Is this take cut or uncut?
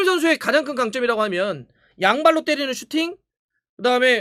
uncut